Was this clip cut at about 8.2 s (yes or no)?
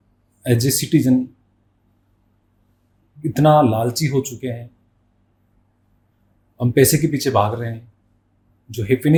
no